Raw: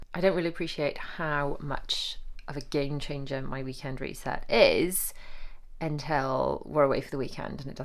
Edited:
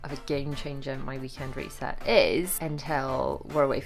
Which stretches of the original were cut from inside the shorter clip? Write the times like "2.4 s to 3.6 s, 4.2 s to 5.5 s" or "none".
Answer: 5.0 s to 5.8 s